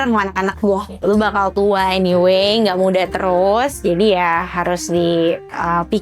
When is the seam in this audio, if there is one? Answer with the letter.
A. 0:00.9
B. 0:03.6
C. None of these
A